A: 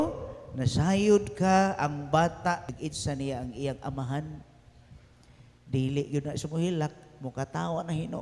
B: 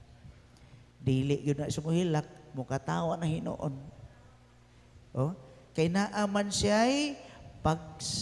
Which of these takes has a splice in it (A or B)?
A